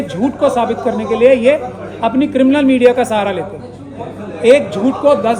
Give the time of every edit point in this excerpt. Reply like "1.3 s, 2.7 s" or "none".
none